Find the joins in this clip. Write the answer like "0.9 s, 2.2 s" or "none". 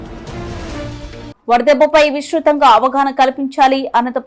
1.3 s

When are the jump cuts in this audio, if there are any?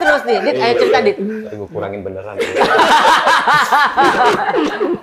1.4 s

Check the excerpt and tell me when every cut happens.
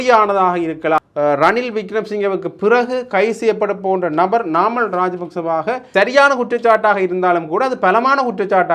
1.0 s, 5.8 s

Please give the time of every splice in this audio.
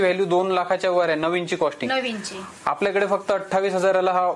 none

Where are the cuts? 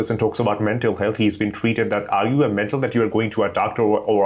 none

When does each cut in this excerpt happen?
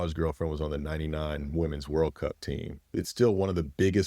2.9 s

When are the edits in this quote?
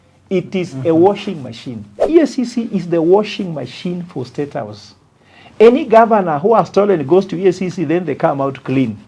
2.0 s

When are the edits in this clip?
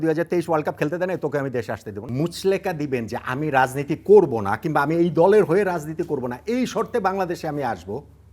2.0 s

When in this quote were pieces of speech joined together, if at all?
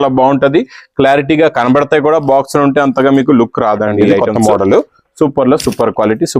4.2 s

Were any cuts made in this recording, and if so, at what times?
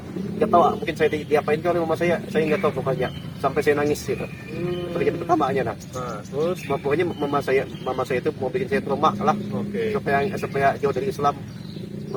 none

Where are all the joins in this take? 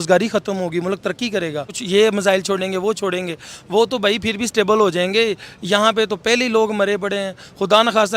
1.8 s

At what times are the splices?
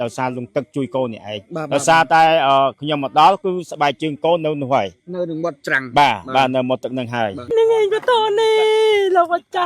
7.5 s

